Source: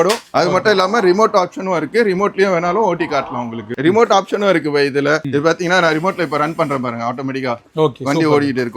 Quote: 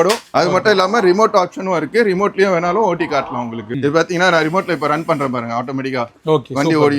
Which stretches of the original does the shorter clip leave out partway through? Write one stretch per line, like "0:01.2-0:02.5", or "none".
0:03.7-0:05.2